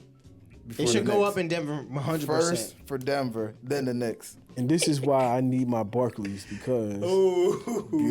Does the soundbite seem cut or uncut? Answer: cut